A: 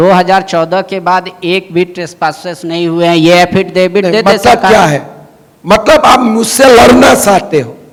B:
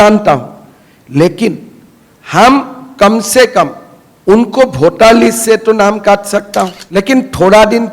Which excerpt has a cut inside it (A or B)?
B